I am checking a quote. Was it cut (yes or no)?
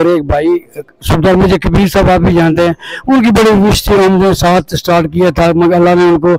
no